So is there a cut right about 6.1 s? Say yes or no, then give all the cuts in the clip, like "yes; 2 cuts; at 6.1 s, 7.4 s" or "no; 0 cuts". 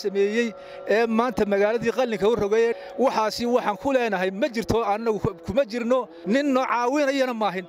yes; 2 cuts; at 2.8 s, 6.1 s